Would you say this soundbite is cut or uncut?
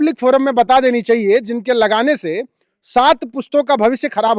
uncut